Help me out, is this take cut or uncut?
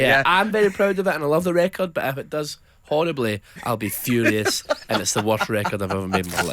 uncut